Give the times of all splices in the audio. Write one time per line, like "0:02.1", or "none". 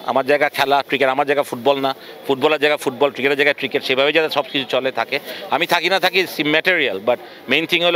none